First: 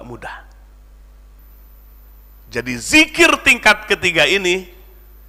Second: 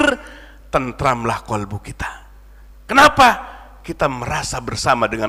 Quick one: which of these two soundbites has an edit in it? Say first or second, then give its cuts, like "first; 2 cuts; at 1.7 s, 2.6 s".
first; 1 cut; at 1.4 s